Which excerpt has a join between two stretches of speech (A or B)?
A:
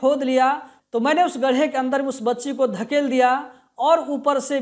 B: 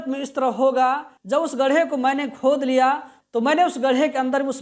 B